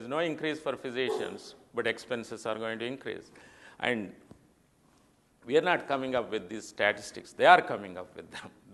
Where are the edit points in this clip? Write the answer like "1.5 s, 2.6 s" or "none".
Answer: none